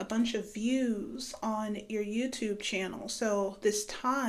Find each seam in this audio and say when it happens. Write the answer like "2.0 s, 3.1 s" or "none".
none